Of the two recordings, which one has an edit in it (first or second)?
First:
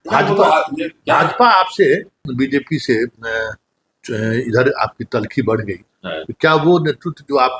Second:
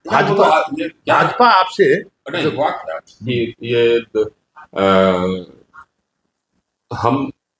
first